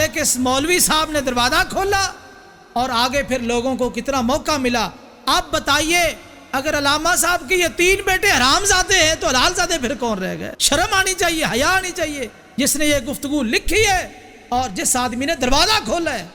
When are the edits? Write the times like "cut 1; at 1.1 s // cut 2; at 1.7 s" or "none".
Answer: none